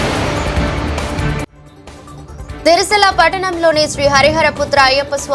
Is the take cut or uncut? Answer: uncut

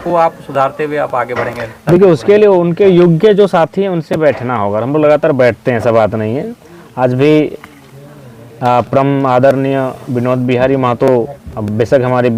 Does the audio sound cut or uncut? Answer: uncut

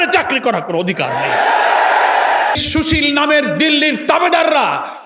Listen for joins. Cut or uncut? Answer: cut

